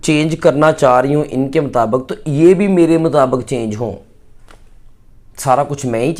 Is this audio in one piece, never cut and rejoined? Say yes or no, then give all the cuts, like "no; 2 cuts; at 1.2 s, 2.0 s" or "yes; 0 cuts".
yes; 0 cuts